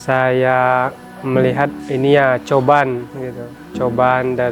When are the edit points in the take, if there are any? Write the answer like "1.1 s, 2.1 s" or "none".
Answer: 1.1 s, 1.8 s